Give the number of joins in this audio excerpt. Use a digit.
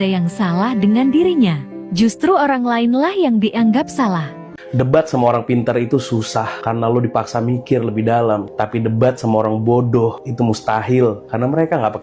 1